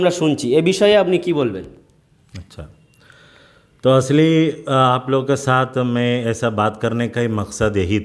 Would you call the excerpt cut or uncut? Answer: uncut